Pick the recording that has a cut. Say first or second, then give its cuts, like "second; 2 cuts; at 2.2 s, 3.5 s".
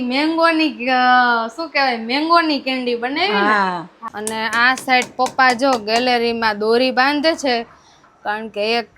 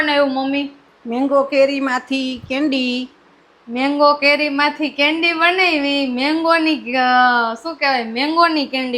first; 1 cut; at 4.0 s